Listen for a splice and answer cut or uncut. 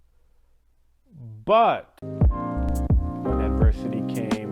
cut